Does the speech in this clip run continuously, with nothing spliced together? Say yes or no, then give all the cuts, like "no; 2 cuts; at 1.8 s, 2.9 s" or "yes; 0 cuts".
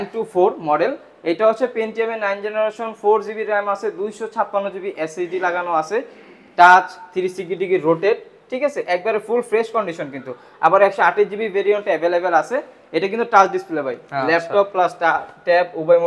yes; 0 cuts